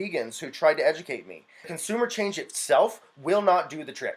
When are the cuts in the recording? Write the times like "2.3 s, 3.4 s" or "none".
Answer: 1.7 s